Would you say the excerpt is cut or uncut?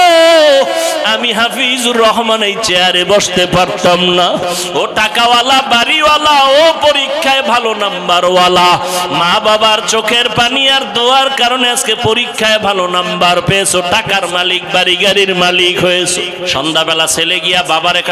cut